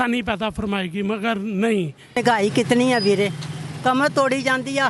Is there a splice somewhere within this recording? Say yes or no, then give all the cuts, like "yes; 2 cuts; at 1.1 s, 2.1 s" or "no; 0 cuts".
yes; 1 cut; at 2.2 s